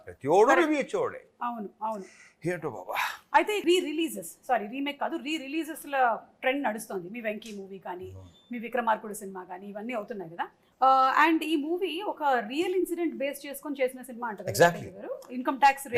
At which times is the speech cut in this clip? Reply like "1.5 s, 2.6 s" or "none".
3.6 s, 10.6 s